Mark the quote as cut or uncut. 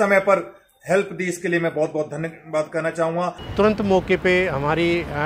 cut